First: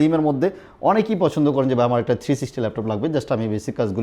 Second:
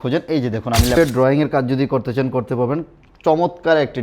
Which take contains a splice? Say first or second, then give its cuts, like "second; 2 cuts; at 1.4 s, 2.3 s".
second; 1 cut; at 1.0 s